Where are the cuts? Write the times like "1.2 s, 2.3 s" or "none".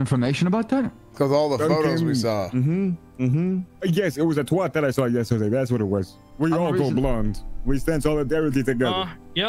1.0 s, 3.7 s, 6.2 s